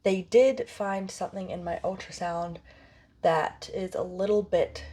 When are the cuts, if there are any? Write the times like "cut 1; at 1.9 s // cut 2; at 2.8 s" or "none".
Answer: none